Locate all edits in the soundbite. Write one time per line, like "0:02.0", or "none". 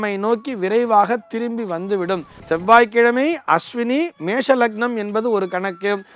0:02.3